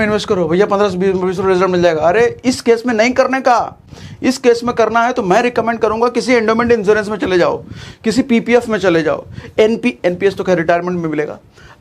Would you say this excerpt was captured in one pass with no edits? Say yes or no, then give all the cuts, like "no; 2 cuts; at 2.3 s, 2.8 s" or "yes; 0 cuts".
yes; 0 cuts